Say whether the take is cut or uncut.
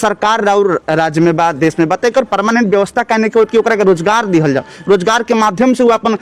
uncut